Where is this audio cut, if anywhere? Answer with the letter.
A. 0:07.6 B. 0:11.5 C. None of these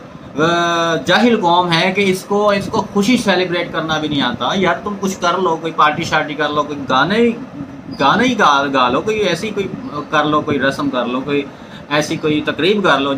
C